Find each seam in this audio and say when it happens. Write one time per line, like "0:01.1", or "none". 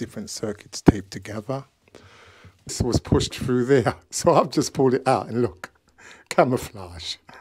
0:02.7